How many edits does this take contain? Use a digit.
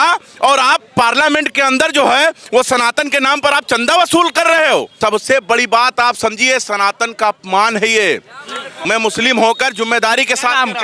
2